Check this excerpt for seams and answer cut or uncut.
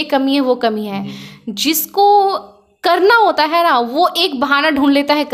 uncut